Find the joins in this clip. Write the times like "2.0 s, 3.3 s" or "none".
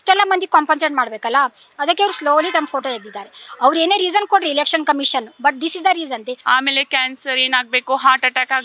6.3 s